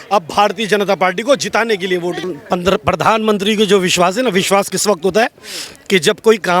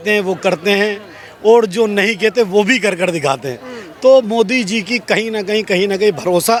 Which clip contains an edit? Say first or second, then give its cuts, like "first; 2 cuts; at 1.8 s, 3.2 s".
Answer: first; 1 cut; at 2.2 s